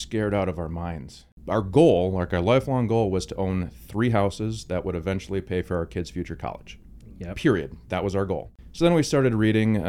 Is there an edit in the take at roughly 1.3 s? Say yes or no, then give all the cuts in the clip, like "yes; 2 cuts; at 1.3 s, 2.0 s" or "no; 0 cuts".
yes; 2 cuts; at 1.3 s, 8.6 s